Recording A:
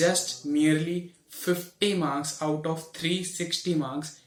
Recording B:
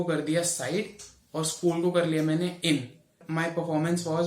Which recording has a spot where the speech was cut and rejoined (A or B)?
B